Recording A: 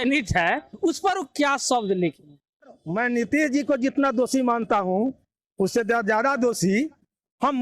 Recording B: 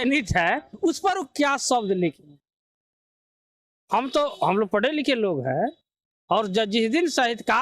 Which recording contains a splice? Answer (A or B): A